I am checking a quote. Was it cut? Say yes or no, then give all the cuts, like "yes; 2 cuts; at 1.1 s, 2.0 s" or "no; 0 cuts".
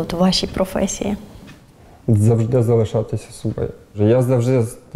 yes; 1 cut; at 3.9 s